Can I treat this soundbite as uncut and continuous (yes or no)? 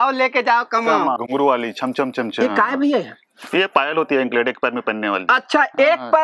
yes